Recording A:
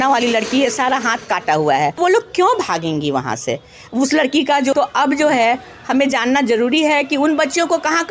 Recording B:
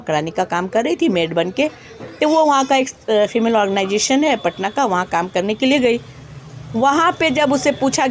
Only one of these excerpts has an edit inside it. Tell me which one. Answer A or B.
A